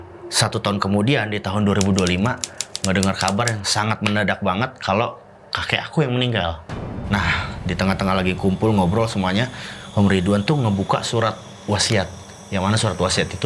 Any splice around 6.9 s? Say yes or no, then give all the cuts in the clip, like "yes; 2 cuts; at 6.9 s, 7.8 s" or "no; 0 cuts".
yes; 1 cut; at 6.9 s